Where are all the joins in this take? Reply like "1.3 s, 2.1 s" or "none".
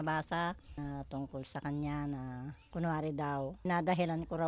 0.8 s, 2.5 s, 3.7 s

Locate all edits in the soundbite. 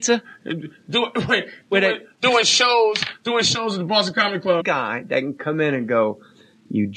none

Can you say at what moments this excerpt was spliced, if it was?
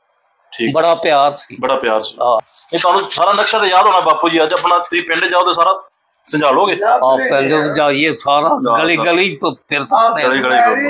2.6 s

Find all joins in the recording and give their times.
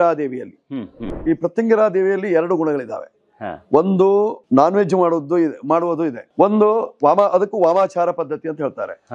1.1 s, 4.4 s, 6.2 s

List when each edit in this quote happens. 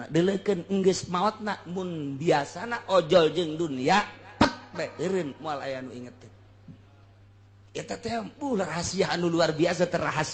none

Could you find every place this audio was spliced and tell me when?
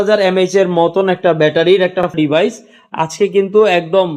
2.1 s

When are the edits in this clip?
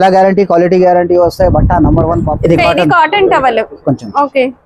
2.3 s

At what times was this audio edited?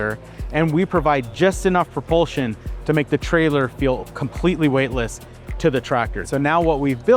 6.2 s

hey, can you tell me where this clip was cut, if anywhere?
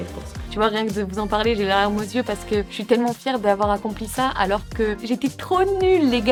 none

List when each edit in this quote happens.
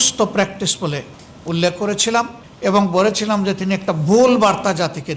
2.4 s

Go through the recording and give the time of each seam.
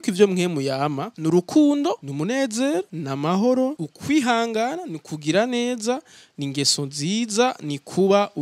1.1 s, 2.1 s, 3.0 s, 3.9 s

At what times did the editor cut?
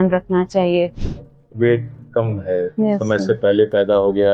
1.0 s

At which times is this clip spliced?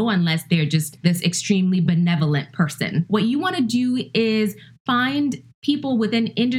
0.9 s, 3.1 s

